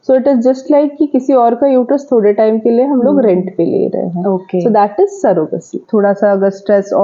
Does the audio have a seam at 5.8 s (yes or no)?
yes